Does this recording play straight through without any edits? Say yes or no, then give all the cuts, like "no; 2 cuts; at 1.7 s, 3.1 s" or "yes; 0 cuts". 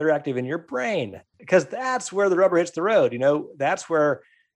no; 1 cut; at 1.3 s